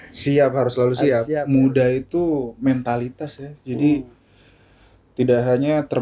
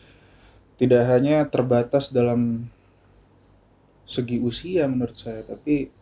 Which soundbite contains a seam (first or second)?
first